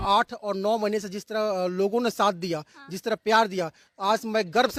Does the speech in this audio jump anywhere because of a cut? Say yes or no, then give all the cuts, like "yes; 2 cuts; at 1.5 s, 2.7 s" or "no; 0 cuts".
no; 0 cuts